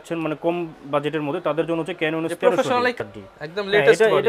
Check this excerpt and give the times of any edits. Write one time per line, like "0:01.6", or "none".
0:03.0